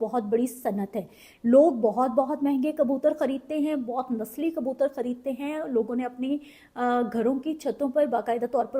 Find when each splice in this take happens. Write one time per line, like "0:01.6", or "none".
none